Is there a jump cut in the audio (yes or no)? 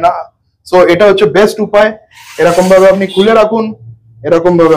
no